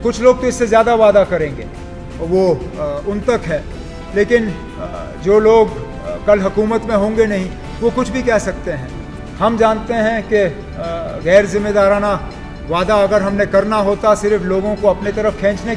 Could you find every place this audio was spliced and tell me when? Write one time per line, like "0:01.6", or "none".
none